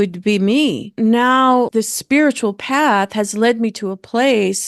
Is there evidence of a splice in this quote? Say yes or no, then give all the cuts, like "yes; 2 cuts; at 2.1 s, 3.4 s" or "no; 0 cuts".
no; 0 cuts